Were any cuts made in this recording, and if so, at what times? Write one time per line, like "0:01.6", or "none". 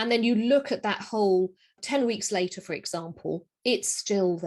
0:01.8